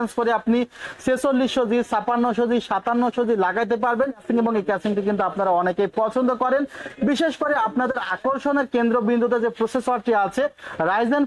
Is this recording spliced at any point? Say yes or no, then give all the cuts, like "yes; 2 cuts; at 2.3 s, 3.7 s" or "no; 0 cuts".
yes; 1 cut; at 4.2 s